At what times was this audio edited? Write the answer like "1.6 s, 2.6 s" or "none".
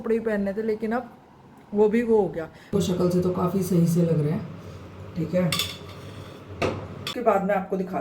2.7 s, 7.1 s